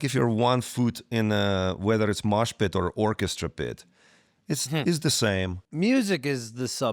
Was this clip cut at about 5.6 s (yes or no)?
yes